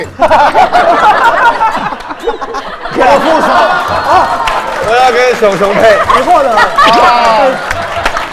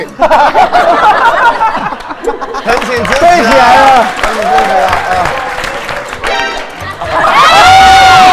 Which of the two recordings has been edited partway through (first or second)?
second